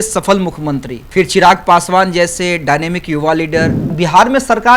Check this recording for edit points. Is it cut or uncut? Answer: cut